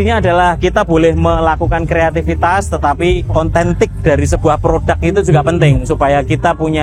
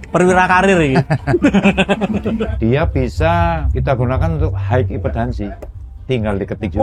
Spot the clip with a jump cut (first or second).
second